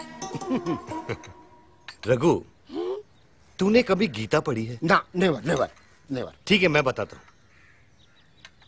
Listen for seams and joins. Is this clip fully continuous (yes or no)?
no